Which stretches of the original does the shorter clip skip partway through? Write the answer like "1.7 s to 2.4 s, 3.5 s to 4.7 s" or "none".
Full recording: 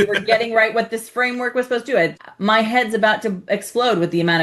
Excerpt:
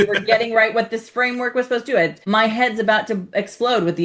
2.2 s to 2.3 s